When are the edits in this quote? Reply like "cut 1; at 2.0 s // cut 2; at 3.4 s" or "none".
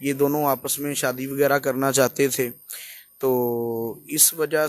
none